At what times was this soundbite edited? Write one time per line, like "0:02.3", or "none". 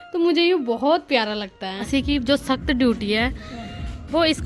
0:01.9